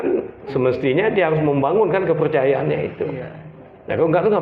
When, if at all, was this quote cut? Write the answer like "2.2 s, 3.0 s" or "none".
none